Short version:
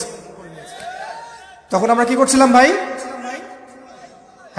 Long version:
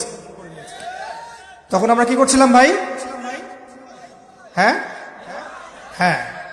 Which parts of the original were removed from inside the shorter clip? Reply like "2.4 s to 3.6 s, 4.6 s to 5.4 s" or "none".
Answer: none